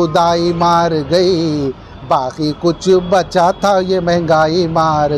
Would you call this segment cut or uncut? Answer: uncut